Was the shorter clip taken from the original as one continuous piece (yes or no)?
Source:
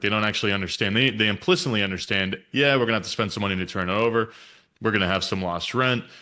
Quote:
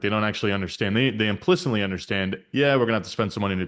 yes